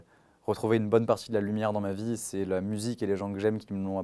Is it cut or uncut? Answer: uncut